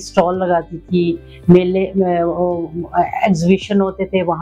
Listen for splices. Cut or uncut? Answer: uncut